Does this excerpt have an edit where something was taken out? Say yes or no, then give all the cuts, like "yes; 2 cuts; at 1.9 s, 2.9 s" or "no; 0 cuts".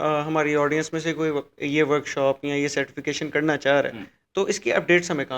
no; 0 cuts